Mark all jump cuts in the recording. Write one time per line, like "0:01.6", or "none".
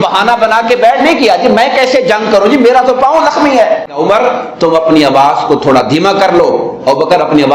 0:03.9